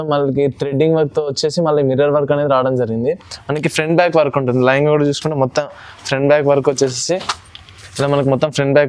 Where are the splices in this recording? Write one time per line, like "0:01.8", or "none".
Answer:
none